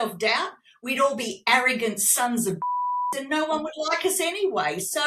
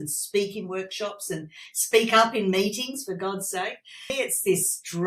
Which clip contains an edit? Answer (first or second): second